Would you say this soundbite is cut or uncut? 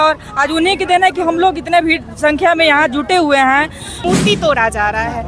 cut